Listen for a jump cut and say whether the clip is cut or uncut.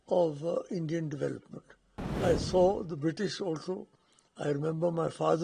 cut